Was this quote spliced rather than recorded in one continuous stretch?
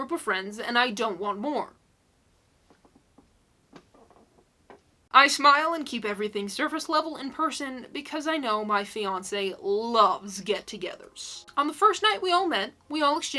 no; 0 cuts

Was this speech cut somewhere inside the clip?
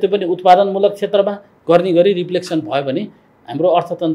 yes; 1 cut; at 3.2 s

